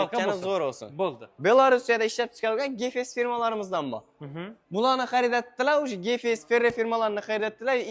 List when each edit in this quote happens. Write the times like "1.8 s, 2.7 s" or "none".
1.3 s